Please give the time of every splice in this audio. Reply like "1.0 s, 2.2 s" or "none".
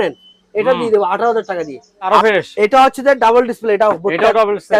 2.1 s